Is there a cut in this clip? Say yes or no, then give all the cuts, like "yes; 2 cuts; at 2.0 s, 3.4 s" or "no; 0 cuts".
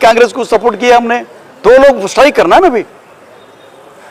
no; 0 cuts